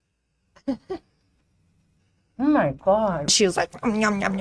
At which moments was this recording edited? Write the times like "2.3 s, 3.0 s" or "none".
3.3 s